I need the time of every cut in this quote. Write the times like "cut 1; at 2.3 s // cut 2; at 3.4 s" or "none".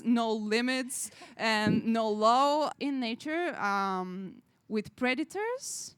cut 1; at 2.7 s